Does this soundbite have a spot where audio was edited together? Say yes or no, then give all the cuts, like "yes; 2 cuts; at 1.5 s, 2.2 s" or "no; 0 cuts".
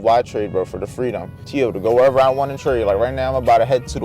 yes; 1 cut; at 1.3 s